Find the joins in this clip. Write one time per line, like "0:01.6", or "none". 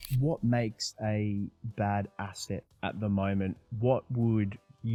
none